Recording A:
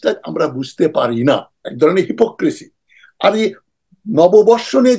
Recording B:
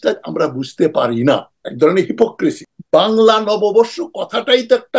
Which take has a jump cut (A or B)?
B